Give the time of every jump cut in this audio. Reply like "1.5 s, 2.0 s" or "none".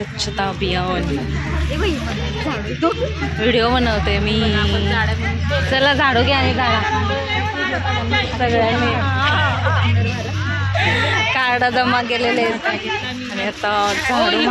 none